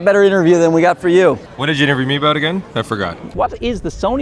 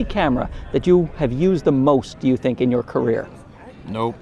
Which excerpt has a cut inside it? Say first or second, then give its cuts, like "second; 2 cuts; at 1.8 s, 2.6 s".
first; 2 cuts; at 1.5 s, 3.3 s